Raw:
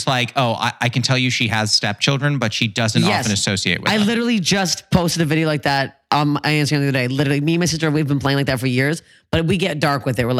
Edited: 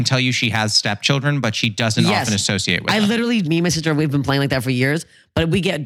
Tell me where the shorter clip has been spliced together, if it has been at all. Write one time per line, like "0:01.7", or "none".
0:03.5